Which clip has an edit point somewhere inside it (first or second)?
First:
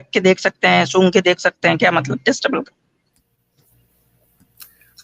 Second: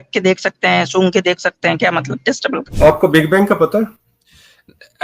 second